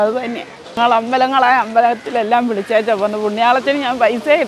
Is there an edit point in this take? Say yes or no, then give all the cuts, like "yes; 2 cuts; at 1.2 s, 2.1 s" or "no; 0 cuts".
no; 0 cuts